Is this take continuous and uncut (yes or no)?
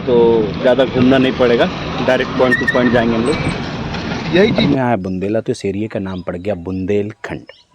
no